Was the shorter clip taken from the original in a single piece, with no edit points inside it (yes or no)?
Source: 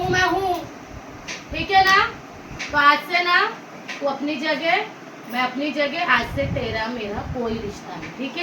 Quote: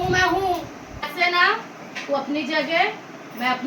no